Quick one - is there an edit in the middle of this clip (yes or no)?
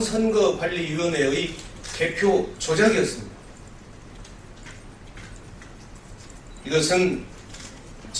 no